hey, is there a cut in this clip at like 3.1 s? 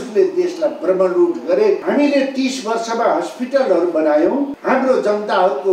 no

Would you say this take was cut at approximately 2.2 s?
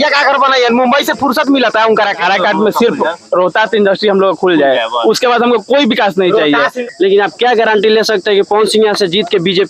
yes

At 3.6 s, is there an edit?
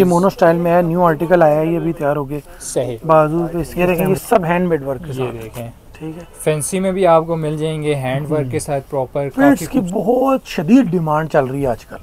yes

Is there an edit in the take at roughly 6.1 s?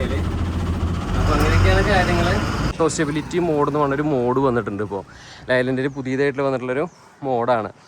no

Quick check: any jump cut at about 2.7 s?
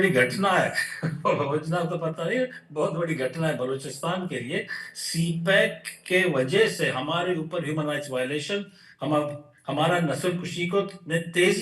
no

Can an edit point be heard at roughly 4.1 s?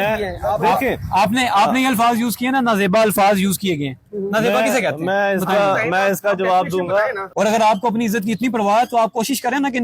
no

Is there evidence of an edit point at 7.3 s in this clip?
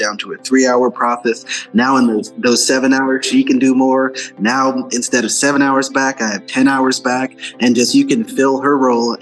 no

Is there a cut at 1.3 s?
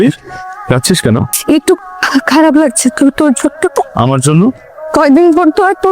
yes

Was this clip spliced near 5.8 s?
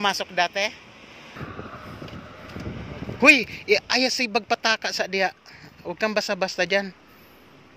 no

